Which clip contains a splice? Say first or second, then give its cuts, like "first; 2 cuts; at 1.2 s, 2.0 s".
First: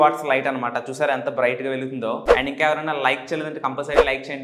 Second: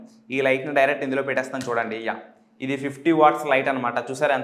first; 1 cut; at 2.2 s